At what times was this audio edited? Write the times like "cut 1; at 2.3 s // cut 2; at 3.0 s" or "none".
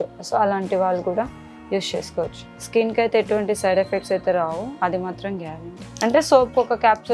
cut 1; at 5.9 s